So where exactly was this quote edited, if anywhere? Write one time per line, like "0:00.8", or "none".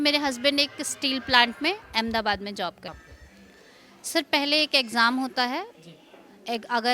0:03.0